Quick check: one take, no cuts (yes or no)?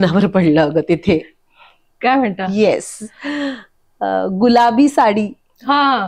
yes